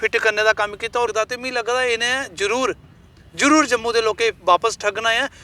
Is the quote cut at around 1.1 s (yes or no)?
yes